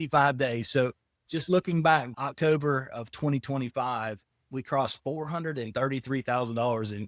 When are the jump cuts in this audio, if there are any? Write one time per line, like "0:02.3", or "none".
0:02.1
0:04.5